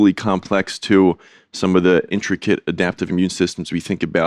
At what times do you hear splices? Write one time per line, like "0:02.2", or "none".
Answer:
0:02.1